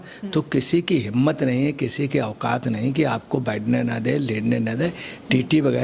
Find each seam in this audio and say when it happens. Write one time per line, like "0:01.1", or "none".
none